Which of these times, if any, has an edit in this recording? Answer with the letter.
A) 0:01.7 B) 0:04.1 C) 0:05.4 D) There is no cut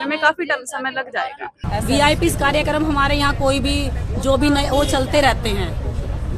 A